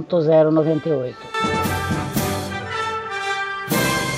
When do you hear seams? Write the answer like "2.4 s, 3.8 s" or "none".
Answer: 1.3 s